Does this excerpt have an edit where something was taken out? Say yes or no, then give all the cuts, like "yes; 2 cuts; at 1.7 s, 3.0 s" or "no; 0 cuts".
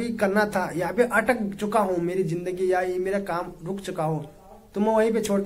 no; 0 cuts